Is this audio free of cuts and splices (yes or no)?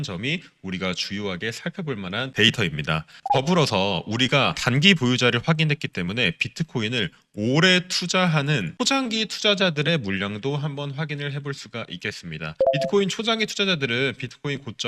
no